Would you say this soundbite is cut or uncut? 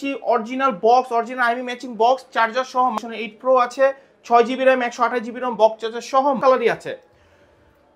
cut